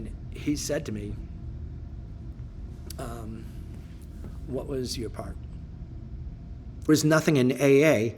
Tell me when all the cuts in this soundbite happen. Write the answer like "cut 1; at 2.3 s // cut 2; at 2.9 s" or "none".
cut 1; at 6.9 s